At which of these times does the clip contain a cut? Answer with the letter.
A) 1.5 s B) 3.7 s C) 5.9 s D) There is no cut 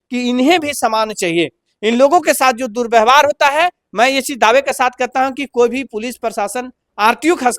D